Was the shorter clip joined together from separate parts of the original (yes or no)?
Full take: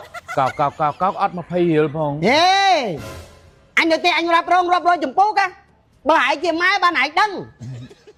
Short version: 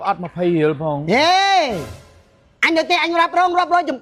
no